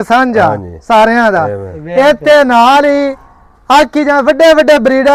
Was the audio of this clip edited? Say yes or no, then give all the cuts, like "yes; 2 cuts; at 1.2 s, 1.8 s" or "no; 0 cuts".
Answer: no; 0 cuts